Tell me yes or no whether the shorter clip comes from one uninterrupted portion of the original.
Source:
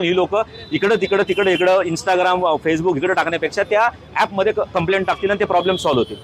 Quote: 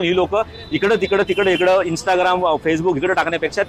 yes